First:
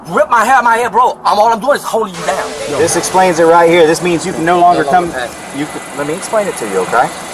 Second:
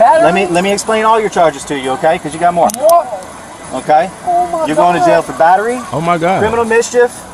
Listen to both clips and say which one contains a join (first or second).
first